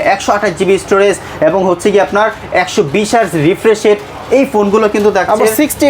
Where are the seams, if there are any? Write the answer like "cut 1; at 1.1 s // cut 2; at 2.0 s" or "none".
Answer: none